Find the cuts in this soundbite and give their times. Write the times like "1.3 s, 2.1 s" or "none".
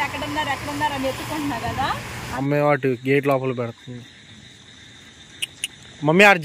2.1 s